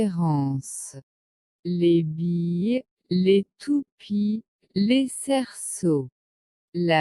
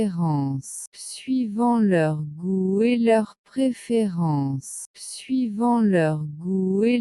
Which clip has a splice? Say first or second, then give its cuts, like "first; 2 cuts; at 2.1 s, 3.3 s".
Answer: first; 2 cuts; at 1.1 s, 4.6 s